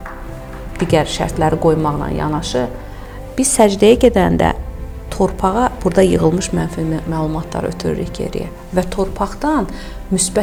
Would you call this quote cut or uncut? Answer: uncut